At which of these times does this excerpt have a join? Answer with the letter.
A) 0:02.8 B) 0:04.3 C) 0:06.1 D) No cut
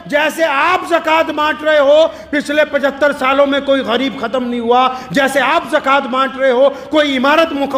D